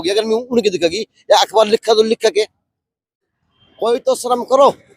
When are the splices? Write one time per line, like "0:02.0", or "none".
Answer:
0:03.2